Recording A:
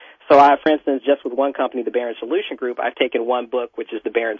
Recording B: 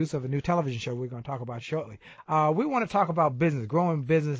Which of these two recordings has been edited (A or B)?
B